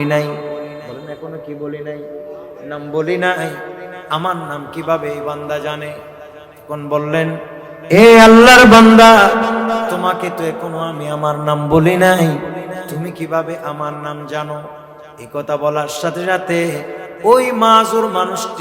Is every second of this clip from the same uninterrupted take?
yes; 0 cuts

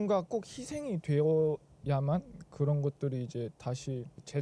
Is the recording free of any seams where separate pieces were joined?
yes; 0 cuts

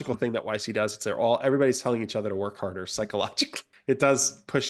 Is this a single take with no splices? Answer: yes; 0 cuts

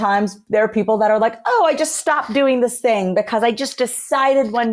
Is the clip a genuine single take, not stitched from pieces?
yes; 0 cuts

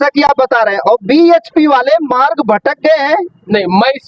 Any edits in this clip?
no; 0 cuts

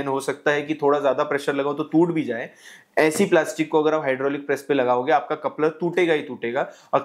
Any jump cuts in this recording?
no; 0 cuts

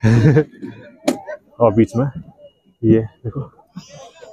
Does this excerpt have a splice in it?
no; 0 cuts

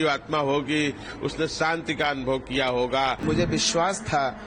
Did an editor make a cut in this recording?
yes; 1 cut; at 3.2 s

